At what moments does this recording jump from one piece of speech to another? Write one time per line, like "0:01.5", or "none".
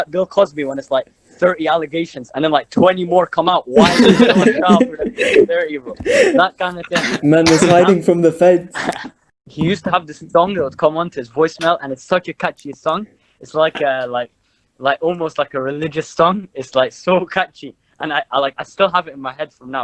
0:09.3